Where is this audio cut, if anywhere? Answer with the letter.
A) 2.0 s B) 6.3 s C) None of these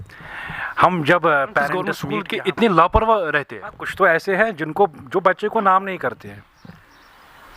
A